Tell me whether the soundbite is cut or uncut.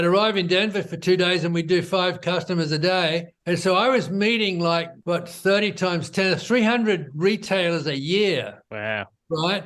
cut